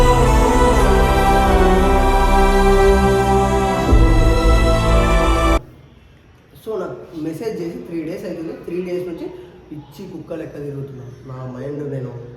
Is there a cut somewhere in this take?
no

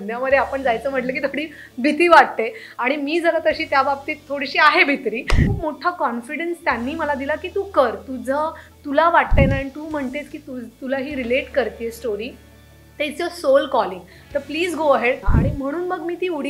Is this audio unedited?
no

